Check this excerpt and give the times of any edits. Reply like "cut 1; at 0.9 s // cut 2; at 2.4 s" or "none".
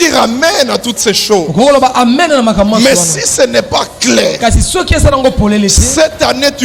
none